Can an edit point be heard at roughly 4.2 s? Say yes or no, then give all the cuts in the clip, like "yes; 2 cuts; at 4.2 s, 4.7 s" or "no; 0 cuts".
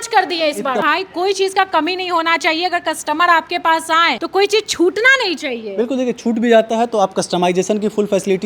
yes; 2 cuts; at 0.8 s, 4.2 s